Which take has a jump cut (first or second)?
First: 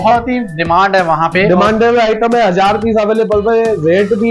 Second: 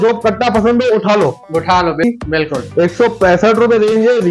second